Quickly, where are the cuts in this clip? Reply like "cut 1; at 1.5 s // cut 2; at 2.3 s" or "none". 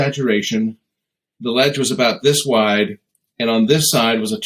none